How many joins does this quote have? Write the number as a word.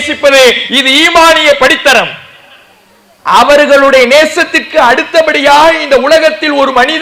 zero